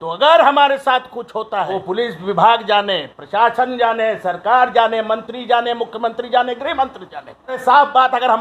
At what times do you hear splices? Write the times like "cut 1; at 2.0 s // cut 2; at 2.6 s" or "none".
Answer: cut 1; at 1.8 s // cut 2; at 7.6 s